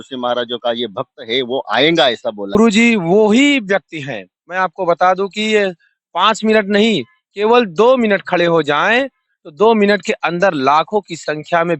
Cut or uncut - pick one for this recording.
cut